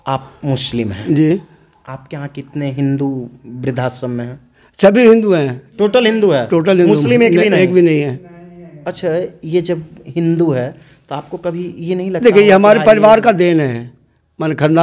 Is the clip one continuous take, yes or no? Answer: yes